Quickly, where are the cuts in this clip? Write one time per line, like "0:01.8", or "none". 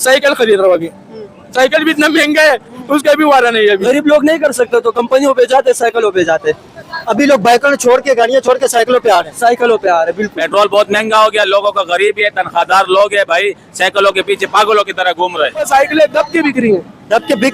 0:03.8
0:10.3
0:15.7